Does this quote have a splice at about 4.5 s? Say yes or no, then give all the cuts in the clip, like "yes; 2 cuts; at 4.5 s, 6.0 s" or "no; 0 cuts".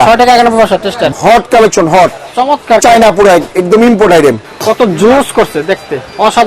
yes; 2 cuts; at 1.1 s, 4.5 s